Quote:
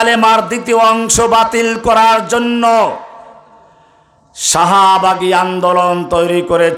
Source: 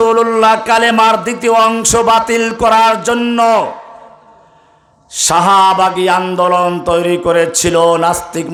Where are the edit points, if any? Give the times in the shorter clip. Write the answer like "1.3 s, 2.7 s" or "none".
none